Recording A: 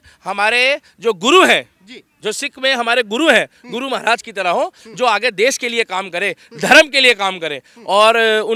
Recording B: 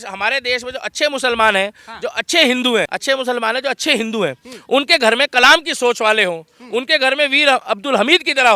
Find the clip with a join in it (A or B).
B